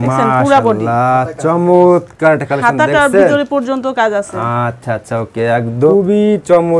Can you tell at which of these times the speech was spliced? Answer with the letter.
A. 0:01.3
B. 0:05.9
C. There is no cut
B